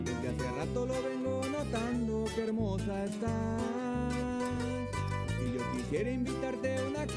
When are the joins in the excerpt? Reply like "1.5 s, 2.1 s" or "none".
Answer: none